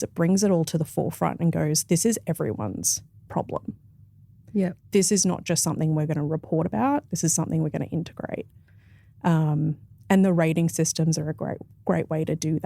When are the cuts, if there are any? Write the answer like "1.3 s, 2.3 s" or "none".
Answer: none